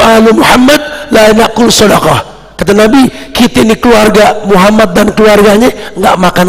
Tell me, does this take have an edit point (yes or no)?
no